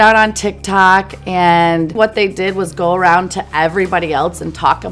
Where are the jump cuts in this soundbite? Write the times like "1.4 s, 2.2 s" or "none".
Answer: 1.9 s